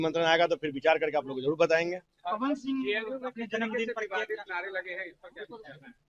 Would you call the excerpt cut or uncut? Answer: uncut